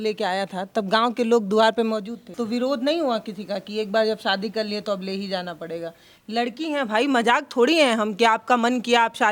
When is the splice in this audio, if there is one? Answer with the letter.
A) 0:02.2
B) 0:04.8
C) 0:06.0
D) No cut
A